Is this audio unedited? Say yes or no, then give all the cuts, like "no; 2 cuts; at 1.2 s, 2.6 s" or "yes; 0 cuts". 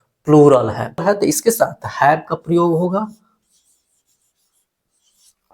no; 1 cut; at 1.0 s